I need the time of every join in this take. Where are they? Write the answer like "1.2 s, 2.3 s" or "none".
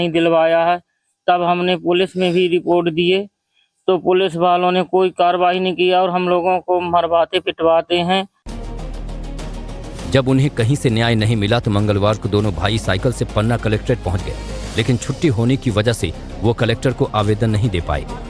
none